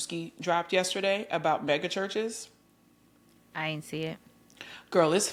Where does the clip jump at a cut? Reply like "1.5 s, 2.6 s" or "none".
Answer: none